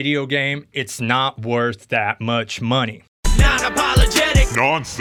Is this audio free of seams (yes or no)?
yes